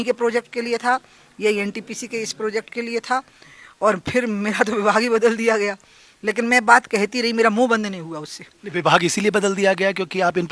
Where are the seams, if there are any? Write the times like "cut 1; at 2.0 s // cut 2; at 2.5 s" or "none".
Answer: none